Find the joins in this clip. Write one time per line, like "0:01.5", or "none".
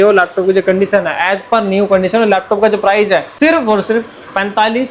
0:03.3